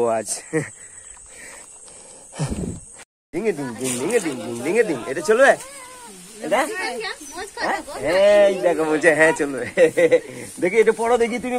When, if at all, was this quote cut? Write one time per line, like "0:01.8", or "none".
0:03.1